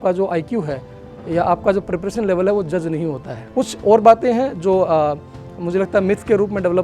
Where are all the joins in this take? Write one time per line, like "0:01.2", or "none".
0:03.3